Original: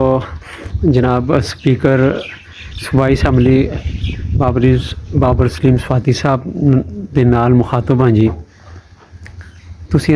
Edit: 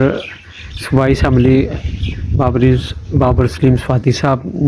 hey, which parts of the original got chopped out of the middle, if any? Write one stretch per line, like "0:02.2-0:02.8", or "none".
none

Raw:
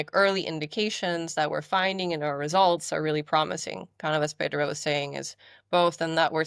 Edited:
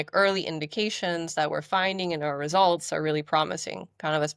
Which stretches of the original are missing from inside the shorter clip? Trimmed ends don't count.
none

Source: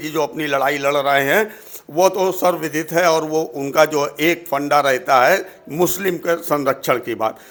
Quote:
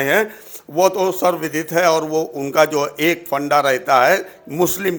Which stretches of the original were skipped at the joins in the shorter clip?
none

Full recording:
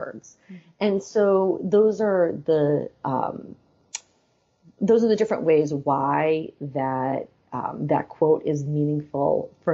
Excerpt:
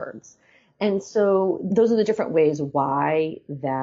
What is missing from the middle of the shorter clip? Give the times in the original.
0:01.6-0:04.7

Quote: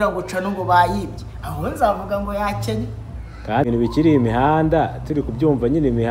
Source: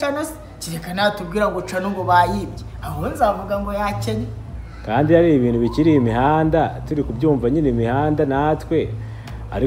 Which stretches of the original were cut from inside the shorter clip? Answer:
0:05.1-0:05.5

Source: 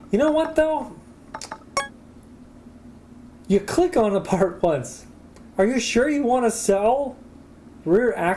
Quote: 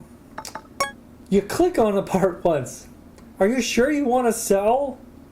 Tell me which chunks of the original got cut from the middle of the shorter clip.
0:02.0-0:03.3

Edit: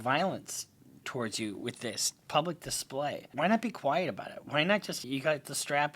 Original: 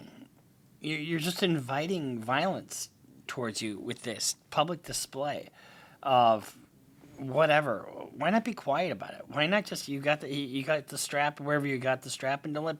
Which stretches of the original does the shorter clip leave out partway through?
0:05.5-0:08.1
0:09.9-0:10.5

